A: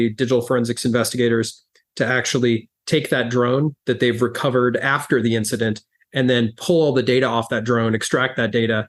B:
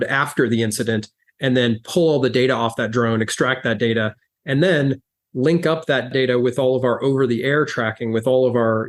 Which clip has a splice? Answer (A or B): B